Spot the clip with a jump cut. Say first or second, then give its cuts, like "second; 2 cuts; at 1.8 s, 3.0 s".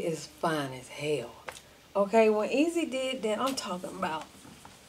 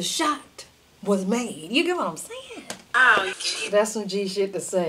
second; 1 cut; at 3.3 s